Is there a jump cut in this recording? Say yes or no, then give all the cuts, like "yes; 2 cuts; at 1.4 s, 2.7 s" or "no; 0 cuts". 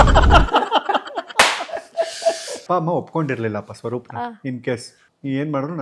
yes; 1 cut; at 2.6 s